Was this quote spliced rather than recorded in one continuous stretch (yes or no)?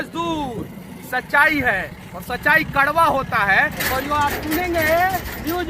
no